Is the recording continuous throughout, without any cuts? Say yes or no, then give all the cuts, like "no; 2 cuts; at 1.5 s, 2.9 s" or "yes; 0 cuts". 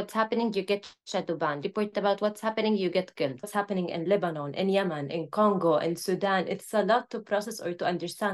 no; 2 cuts; at 1.6 s, 3.5 s